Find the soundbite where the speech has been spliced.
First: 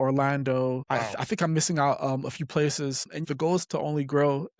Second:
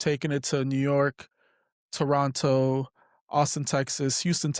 first; 2 cuts; at 0.8 s, 3.2 s

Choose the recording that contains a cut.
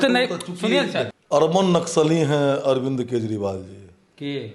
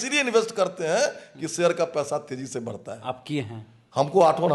first; 1 cut; at 1.2 s

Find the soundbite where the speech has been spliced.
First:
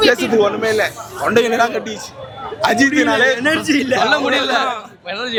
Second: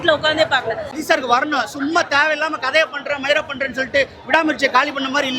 second; 1 cut; at 1.0 s

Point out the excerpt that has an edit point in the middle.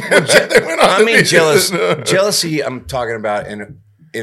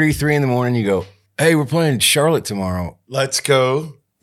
second; 2 cuts; at 1.2 s, 3.0 s

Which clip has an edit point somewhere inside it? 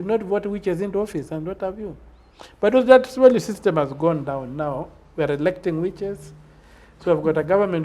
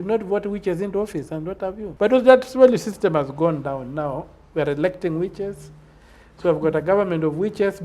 second; 1 cut; at 1.9 s

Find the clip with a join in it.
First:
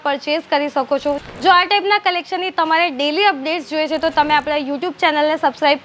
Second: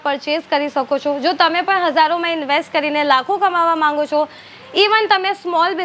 first; 1 cut; at 1.2 s

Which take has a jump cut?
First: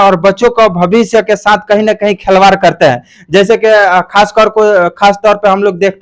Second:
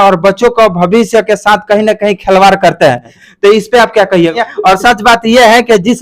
second; 2 cuts; at 3.1 s, 4.3 s

